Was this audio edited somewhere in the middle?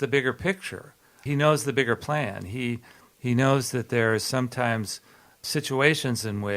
yes; 2 cuts; at 1.1 s, 5.3 s

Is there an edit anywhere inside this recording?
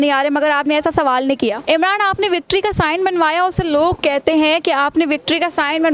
yes; 1 cut; at 1.6 s

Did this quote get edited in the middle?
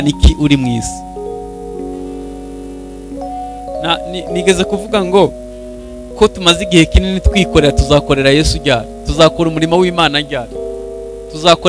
no; 0 cuts

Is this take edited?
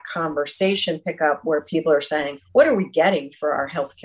yes; 1 cut; at 2.4 s

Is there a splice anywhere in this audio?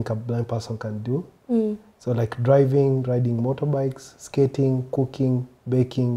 no; 0 cuts

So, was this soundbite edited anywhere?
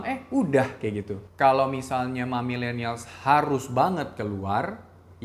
yes; 1 cut; at 1.2 s

